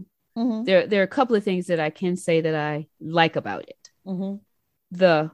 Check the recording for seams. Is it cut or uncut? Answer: uncut